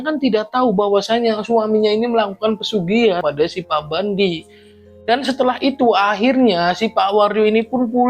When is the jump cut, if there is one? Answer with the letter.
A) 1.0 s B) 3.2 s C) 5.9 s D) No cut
B